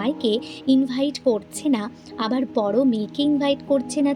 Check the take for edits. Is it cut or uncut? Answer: uncut